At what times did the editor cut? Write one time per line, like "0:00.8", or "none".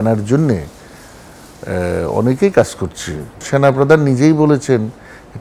0:03.4

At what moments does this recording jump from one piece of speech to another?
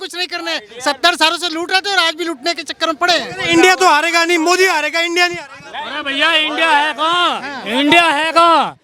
none

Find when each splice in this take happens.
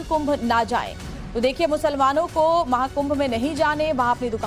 none

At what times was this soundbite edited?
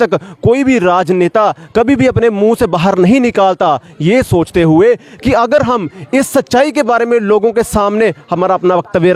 none

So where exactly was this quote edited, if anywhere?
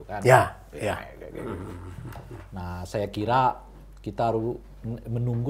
none

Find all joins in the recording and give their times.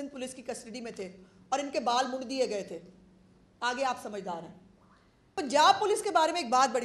0:05.3

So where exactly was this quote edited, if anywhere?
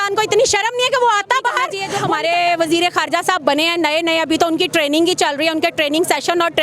0:01.8

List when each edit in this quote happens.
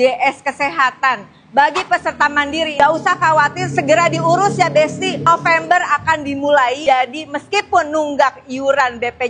0:02.7

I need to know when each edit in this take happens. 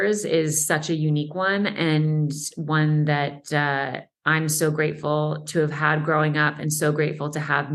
none

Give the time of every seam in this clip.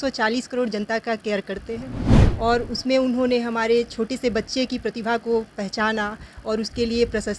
none

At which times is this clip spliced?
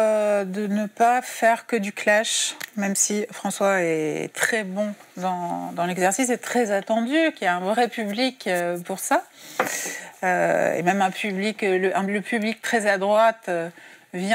none

